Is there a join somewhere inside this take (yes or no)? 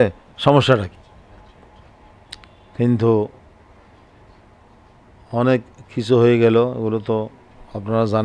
no